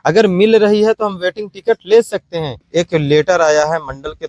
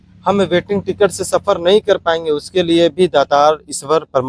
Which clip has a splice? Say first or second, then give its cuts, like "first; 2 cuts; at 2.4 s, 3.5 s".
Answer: first; 1 cut; at 2.6 s